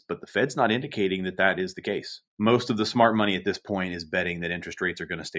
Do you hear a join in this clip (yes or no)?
yes